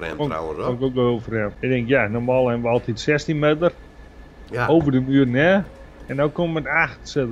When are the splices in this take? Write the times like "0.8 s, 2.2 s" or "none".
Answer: 1.6 s